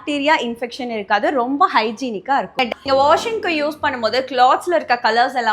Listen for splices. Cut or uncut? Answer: cut